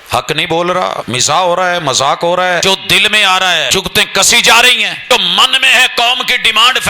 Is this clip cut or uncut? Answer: cut